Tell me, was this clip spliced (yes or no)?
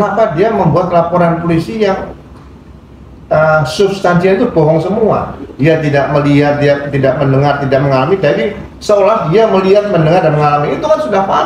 no